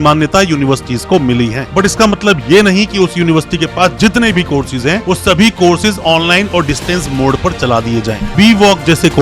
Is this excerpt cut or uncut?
cut